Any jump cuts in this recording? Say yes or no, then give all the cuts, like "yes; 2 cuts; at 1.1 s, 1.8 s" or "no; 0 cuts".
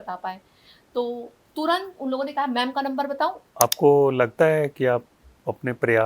yes; 1 cut; at 3.4 s